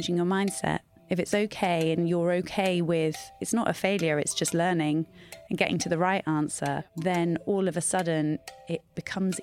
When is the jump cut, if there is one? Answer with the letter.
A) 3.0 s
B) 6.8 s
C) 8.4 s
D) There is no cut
B